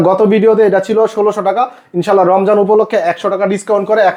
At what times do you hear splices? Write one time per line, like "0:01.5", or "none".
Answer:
none